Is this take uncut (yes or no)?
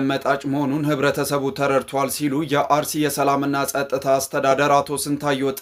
yes